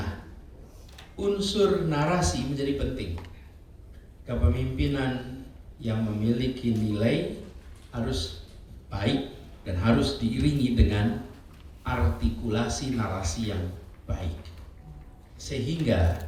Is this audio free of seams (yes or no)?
yes